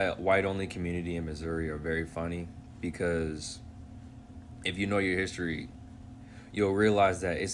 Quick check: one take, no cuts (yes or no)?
yes